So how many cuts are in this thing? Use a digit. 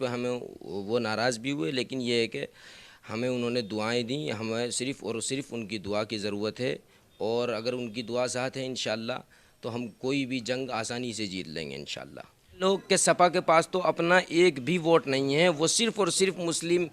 1